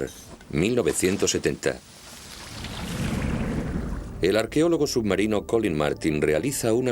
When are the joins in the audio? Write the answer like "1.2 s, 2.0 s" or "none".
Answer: 2.2 s